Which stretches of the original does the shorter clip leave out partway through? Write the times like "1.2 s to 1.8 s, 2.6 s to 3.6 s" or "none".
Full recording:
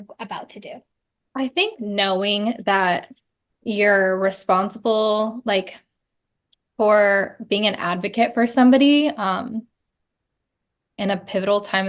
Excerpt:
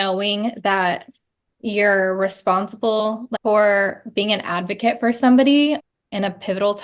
5.0 s to 6.4 s, 9.2 s to 10.7 s